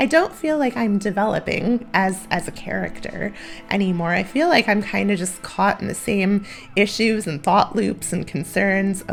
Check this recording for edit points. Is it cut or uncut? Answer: uncut